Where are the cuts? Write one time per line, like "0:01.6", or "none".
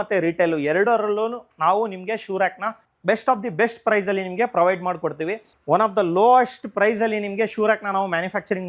0:05.5